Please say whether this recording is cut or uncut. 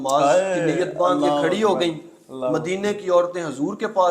uncut